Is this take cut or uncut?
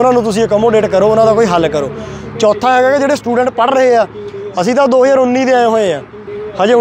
uncut